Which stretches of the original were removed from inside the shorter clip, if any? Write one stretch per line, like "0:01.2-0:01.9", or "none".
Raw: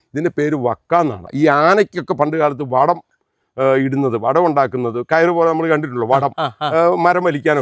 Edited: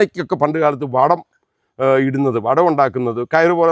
none